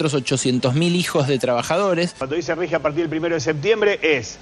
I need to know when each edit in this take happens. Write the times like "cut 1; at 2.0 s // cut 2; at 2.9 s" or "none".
cut 1; at 2.2 s